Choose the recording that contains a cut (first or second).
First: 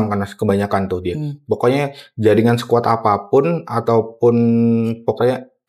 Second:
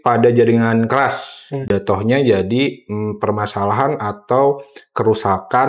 second